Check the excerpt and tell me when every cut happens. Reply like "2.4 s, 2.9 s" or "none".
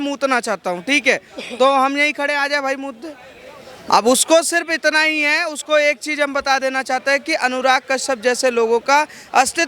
none